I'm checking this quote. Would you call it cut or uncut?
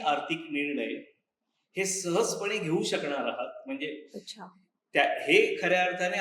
uncut